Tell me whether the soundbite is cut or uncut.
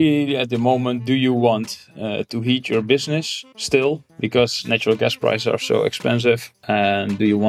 cut